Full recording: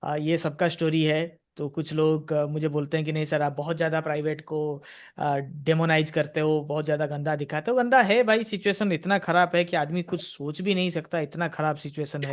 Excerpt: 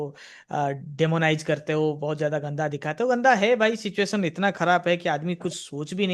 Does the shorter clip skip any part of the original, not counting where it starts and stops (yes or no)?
no